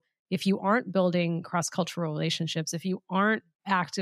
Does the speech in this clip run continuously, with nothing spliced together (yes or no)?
yes